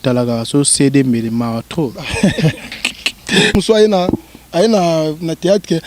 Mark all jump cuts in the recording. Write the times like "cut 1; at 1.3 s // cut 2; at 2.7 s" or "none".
cut 1; at 3.6 s